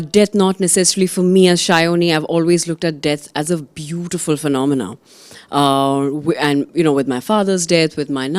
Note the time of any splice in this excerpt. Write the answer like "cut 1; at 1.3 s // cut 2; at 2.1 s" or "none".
none